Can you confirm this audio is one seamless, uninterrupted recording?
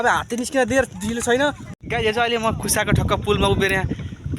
no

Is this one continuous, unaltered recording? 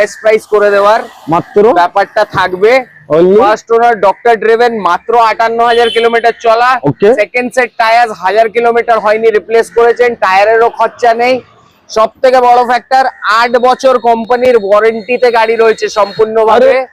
yes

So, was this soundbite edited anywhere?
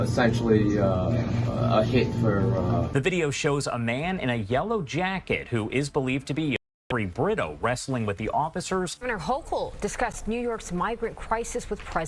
yes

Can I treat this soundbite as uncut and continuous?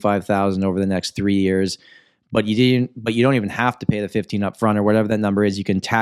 yes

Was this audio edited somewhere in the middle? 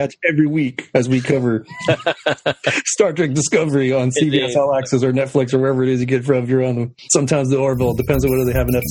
yes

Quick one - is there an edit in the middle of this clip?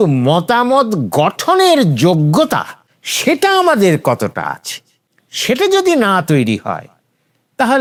no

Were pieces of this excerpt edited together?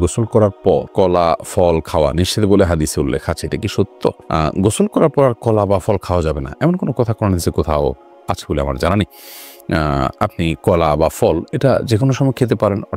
no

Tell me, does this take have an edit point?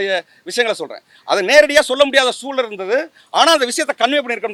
no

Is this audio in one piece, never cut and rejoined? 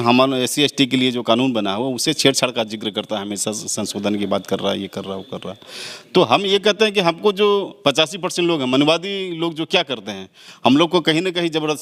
yes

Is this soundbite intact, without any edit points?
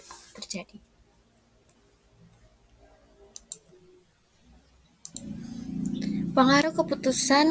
no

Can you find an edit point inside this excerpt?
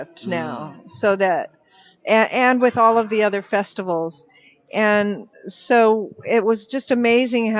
yes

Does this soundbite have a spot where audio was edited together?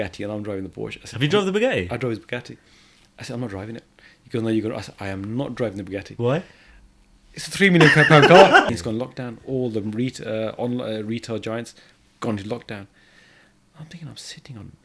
yes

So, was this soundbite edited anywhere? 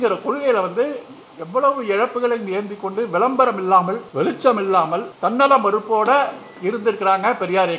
yes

